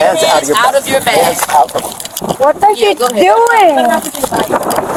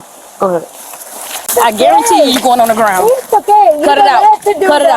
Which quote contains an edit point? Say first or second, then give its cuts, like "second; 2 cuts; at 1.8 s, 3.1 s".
second; 1 cut; at 1.5 s